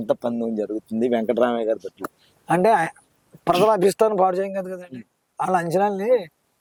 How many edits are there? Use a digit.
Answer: 0